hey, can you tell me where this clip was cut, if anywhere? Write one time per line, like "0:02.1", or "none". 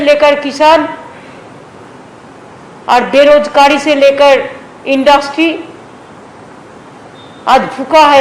none